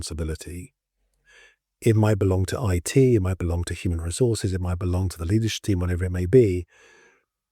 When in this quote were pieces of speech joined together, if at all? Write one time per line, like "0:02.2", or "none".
none